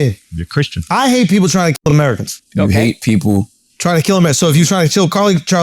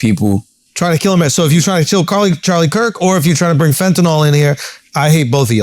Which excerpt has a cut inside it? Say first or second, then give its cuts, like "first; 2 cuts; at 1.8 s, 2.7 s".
first; 1 cut; at 1.8 s